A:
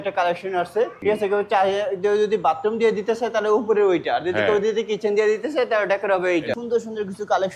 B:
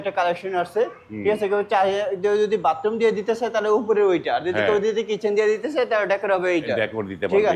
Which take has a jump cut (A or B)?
A